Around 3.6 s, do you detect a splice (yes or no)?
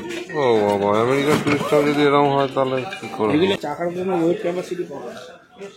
yes